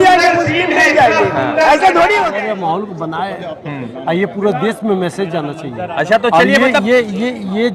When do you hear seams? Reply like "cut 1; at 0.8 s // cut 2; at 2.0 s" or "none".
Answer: cut 1; at 2.4 s